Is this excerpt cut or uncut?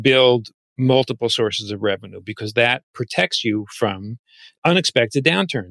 cut